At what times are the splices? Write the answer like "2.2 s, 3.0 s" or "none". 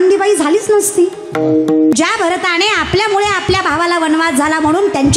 1.9 s